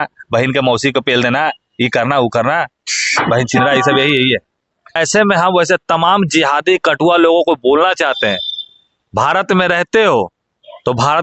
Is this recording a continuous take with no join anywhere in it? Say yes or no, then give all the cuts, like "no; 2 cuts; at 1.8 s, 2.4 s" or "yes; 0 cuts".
no; 1 cut; at 5.0 s